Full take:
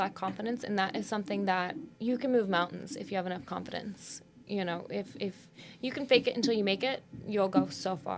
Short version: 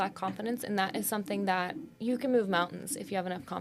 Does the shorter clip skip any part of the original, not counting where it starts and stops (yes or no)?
no